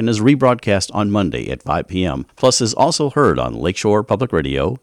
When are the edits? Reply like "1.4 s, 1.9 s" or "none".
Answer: 2.3 s